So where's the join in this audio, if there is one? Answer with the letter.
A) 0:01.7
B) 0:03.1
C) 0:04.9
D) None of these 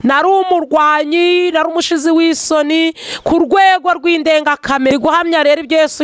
C